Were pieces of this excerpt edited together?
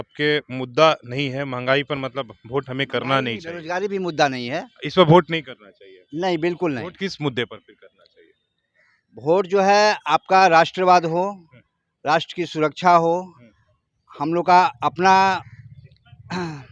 no; 0 cuts

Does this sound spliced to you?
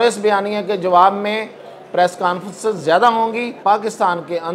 yes; 1 cut; at 3.6 s

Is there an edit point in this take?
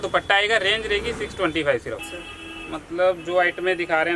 yes; 1 cut; at 2.1 s

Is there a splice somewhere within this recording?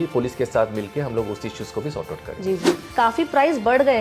yes; 1 cut; at 2.8 s

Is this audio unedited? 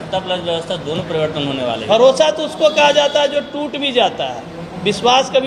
no; 1 cut; at 1.8 s

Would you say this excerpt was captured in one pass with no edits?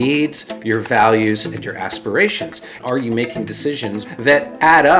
no; 2 cuts; at 2.7 s, 4.0 s

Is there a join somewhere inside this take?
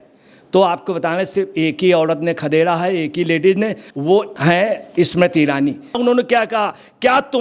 yes; 2 cuts; at 4.3 s, 6.0 s

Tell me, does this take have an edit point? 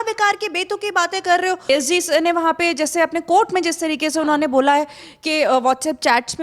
yes; 1 cut; at 1.7 s

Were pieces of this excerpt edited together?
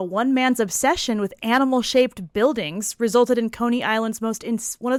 no; 0 cuts

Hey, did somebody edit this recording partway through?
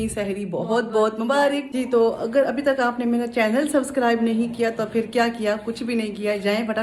yes; 1 cut; at 1.7 s

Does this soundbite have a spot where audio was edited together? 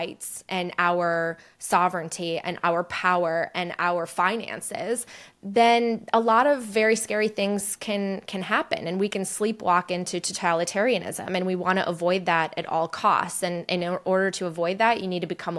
no; 0 cuts

